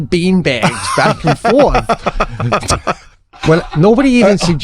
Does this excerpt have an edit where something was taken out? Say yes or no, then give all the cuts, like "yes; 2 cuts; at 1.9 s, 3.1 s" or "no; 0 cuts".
yes; 1 cut; at 3.1 s